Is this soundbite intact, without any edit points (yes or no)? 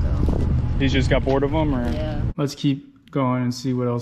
no